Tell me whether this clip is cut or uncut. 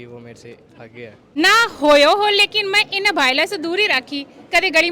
cut